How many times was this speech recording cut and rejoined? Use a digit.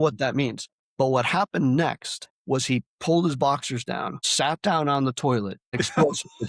1